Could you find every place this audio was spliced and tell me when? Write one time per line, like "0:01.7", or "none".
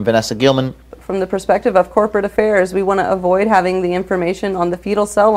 0:00.9